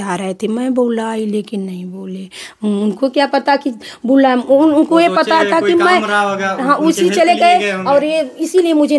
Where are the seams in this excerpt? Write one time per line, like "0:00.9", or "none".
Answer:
none